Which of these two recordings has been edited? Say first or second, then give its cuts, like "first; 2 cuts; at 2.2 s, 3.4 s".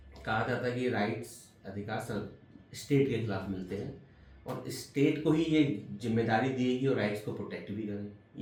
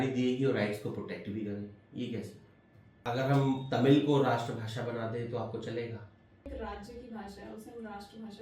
second; 2 cuts; at 2.9 s, 6.5 s